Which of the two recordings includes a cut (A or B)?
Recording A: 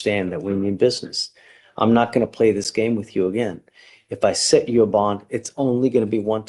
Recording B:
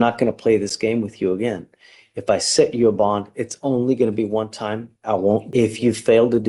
B